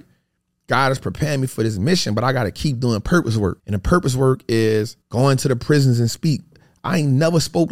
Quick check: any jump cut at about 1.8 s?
no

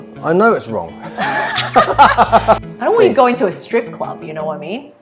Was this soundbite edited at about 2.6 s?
yes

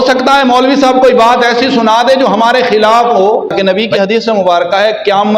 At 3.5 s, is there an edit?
yes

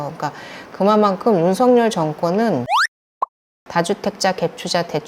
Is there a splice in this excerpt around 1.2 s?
no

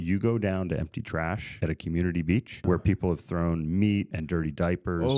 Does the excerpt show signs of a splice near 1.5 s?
yes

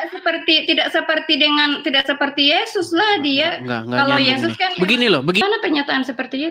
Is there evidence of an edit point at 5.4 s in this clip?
yes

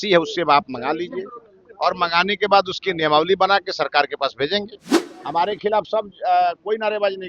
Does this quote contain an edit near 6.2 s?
no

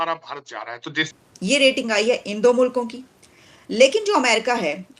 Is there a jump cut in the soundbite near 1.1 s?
yes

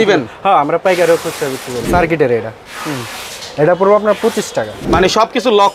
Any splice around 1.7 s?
yes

